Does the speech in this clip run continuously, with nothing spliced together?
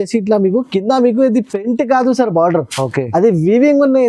yes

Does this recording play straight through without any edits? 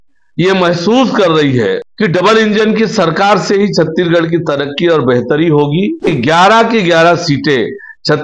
no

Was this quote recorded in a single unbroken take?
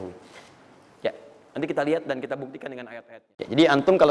no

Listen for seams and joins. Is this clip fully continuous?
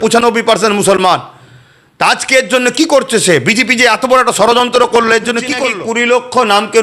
no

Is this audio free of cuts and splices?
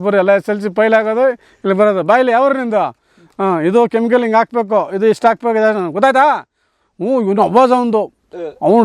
yes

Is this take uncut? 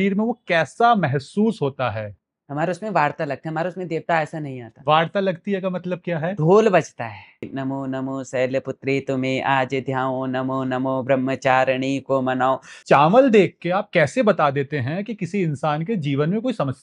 no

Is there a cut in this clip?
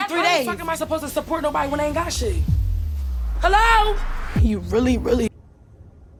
no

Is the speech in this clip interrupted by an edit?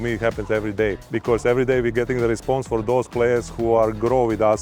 yes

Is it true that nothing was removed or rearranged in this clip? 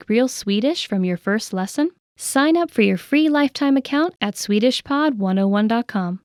yes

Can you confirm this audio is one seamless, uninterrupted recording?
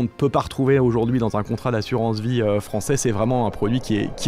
yes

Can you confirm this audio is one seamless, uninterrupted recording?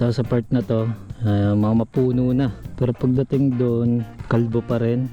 no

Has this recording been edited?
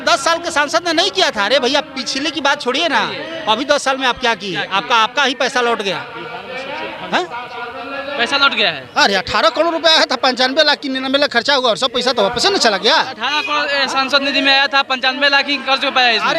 no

